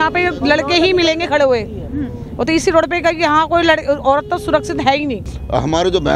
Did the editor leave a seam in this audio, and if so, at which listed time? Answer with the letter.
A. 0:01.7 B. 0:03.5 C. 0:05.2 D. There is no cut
C